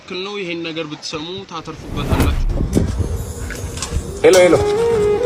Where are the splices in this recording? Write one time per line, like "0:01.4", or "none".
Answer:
0:02.4